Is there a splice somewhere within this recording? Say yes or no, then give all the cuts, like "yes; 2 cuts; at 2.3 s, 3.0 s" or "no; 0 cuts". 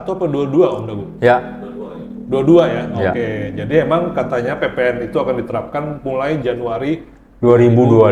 no; 0 cuts